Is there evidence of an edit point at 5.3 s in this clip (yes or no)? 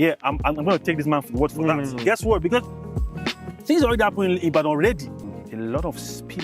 yes